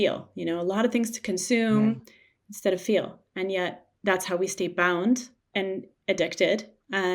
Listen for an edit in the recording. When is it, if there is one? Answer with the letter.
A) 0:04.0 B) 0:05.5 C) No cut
B